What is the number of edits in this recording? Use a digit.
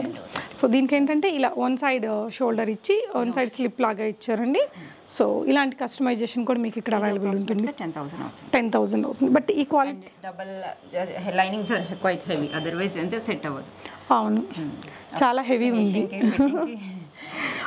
0